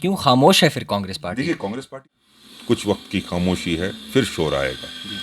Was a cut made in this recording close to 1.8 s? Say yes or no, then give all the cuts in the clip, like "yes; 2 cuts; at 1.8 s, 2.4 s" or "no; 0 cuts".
yes; 1 cut; at 1.8 s